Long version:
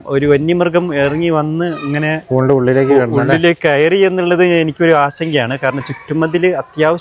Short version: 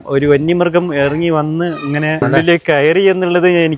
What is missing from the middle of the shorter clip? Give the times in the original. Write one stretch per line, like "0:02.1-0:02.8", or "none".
0:02.2-0:03.2